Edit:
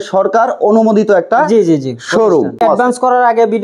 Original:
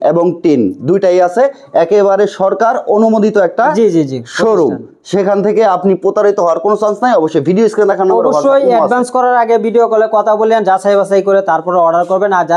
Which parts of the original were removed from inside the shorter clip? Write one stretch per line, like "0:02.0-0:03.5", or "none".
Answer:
0:04.9-0:08.7